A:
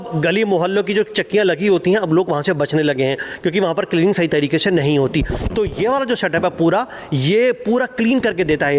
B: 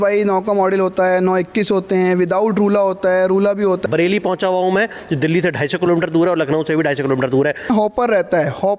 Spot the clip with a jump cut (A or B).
B